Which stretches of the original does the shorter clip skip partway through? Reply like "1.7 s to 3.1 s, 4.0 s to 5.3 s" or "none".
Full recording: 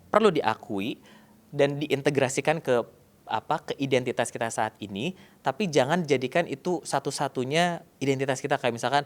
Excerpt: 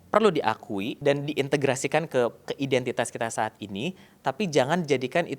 0.9 s to 1.5 s, 3.0 s to 3.7 s